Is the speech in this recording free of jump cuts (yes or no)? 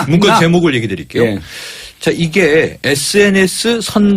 no